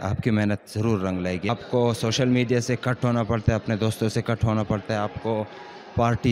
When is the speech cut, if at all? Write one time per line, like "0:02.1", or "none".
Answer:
0:01.5